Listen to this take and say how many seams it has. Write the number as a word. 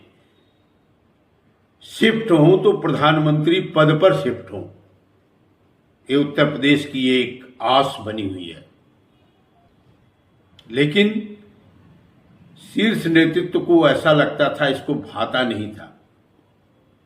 one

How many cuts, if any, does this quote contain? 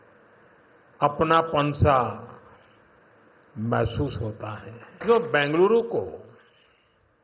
one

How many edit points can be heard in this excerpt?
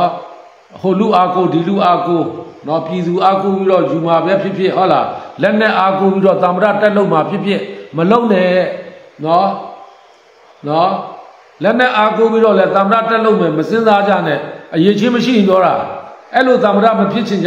one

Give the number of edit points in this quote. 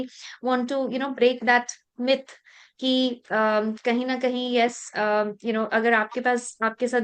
zero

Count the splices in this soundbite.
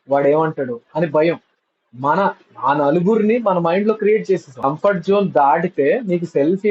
one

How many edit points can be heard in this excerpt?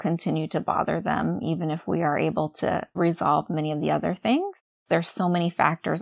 two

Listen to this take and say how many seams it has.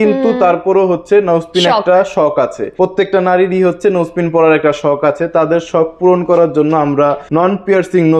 two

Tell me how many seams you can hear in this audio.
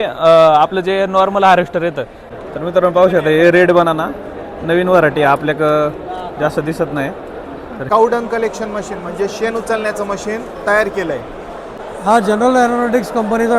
three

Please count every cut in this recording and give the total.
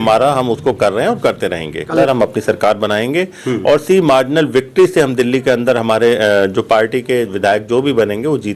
one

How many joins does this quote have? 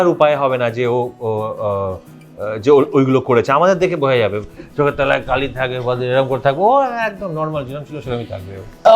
zero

